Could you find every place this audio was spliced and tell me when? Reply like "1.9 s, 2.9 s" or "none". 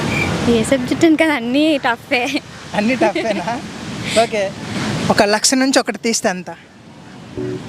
4.7 s